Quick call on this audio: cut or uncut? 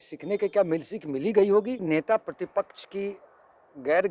cut